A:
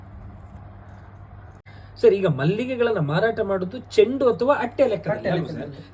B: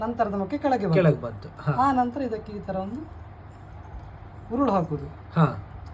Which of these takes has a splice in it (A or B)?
A